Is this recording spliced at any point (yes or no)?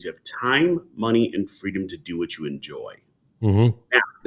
no